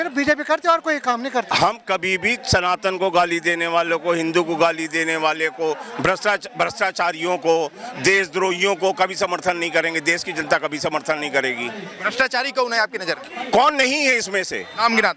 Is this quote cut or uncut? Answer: uncut